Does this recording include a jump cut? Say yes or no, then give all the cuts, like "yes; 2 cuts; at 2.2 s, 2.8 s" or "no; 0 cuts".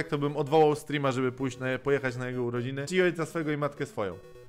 yes; 1 cut; at 2.8 s